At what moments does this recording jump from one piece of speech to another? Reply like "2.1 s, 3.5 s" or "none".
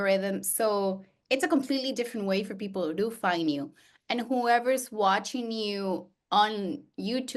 none